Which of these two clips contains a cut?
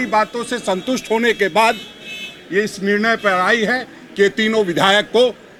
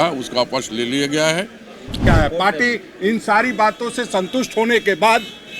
second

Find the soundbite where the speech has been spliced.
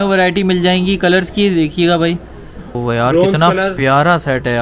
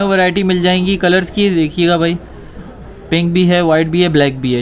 first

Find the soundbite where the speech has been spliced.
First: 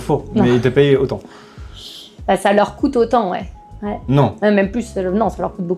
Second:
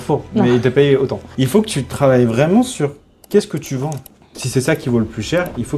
second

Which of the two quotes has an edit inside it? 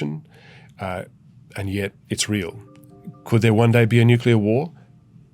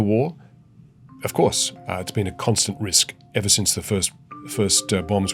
first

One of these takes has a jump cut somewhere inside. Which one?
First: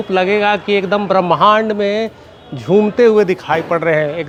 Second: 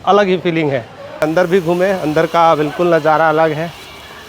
second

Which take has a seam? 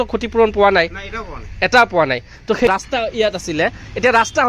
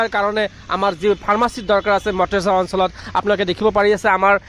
first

